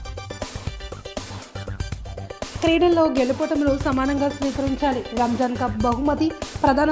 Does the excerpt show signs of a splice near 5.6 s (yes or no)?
no